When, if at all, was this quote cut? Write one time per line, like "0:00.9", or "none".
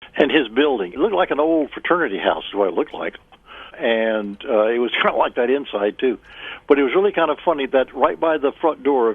0:00.9